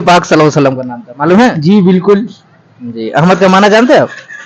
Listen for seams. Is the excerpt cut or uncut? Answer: uncut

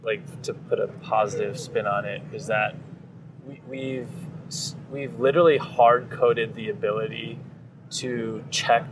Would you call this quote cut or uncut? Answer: uncut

